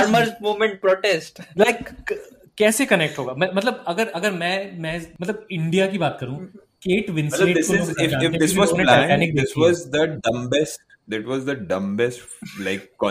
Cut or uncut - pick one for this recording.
cut